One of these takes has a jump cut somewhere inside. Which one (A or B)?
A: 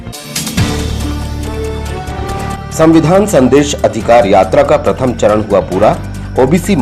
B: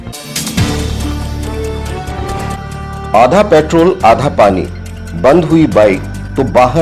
A